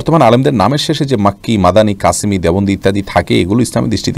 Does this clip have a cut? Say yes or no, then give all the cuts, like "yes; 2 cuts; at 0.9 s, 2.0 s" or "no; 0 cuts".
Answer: no; 0 cuts